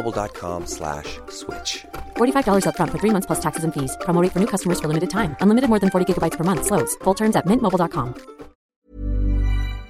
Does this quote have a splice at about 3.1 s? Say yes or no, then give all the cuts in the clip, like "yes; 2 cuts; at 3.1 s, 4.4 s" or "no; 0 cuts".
no; 1 cut; at 8.7 s